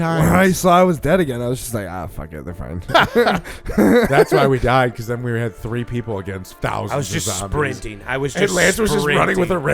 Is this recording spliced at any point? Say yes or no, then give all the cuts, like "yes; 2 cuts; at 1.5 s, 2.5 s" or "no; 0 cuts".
yes; 2 cuts; at 2.8 s, 6.5 s